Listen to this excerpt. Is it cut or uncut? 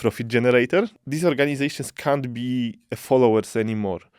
cut